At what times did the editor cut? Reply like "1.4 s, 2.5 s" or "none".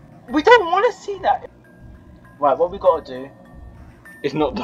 1.5 s